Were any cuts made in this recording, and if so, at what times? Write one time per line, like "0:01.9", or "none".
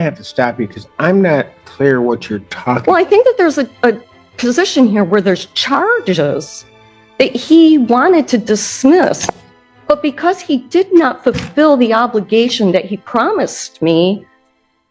none